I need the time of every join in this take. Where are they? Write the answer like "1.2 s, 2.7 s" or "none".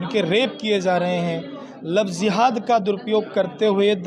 none